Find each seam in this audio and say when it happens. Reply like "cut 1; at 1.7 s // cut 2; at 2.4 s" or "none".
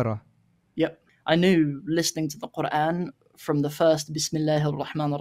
cut 1; at 1.1 s